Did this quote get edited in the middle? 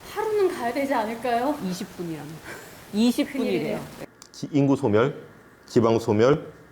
yes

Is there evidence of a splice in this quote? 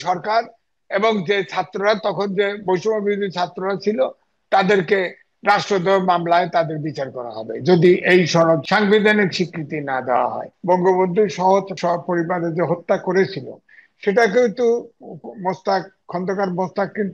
yes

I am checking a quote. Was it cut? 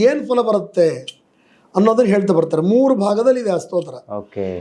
no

